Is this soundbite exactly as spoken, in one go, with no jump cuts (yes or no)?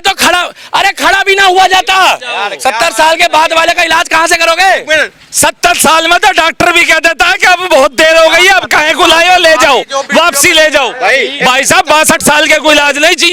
yes